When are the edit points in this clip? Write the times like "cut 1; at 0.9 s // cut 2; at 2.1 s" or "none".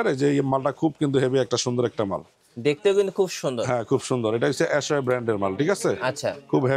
none